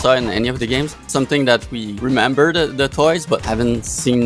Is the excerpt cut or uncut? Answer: cut